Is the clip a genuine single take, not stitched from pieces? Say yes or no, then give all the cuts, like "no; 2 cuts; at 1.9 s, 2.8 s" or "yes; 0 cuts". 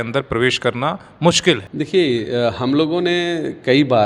yes; 0 cuts